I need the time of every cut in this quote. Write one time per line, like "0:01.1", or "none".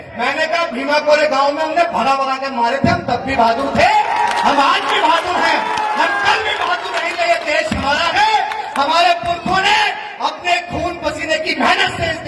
none